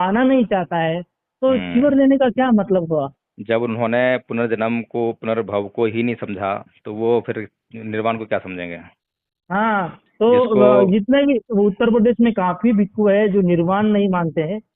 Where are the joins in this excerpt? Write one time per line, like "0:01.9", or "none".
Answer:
none